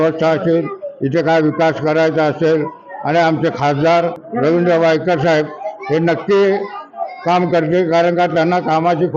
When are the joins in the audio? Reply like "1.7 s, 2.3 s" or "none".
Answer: 4.2 s